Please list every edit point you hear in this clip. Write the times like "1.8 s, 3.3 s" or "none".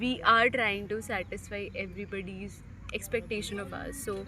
none